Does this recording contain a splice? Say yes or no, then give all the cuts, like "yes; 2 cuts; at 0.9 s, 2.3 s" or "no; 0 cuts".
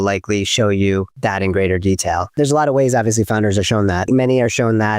yes; 3 cuts; at 1.1 s, 2.3 s, 4.1 s